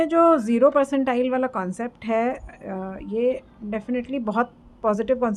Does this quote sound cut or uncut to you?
uncut